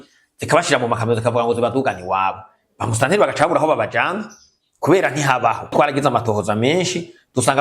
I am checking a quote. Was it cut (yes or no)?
yes